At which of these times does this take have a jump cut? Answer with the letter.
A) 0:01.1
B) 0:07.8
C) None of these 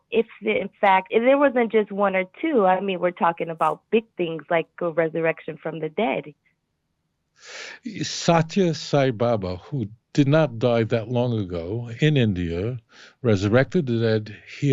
A